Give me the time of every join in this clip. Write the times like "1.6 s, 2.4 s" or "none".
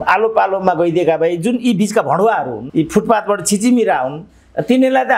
2.6 s